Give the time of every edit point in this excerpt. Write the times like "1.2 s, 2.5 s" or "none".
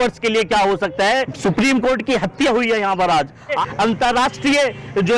1.3 s, 3.6 s